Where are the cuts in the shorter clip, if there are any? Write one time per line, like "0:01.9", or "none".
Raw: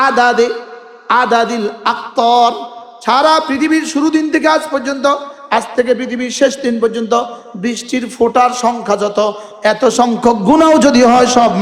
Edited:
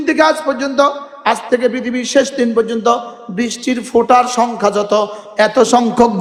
none